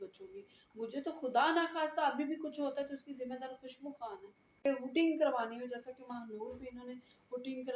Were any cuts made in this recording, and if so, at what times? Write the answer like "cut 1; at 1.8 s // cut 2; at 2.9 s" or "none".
cut 1; at 4.6 s

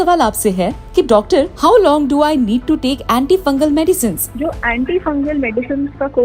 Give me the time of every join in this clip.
cut 1; at 1.5 s

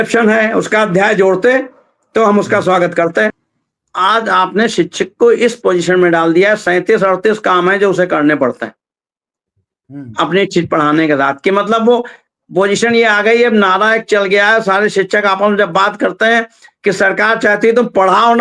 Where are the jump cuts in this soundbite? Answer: cut 1; at 3.3 s

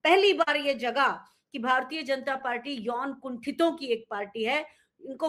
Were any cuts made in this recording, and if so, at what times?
none

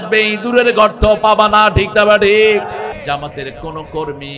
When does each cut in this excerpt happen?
cut 1; at 2.9 s

